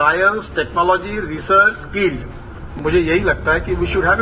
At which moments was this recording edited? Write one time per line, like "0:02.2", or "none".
0:02.7